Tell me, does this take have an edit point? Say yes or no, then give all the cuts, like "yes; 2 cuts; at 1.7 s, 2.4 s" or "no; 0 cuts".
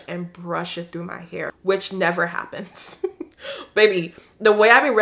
yes; 1 cut; at 1.6 s